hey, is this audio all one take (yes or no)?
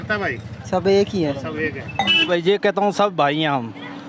no